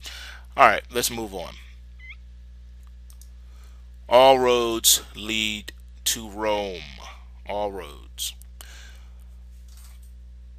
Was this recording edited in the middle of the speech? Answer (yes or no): no